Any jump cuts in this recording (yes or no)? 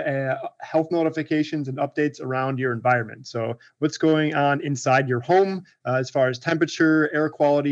no